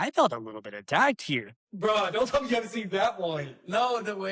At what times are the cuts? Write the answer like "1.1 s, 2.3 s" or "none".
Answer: 1.5 s